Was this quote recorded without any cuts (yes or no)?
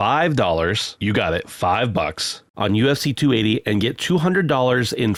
yes